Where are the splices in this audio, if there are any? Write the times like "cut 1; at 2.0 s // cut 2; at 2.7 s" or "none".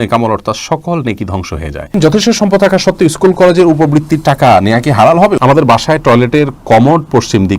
cut 1; at 1.9 s // cut 2; at 5.3 s